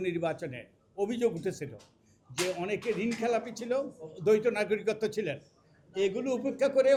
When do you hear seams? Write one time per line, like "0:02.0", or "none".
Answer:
none